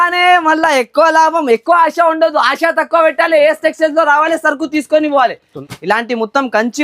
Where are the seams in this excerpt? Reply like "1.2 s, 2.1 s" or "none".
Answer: 5.5 s